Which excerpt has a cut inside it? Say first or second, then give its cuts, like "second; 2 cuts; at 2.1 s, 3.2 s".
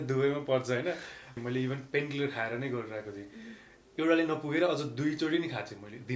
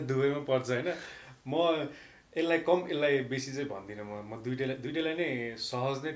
first; 1 cut; at 1.4 s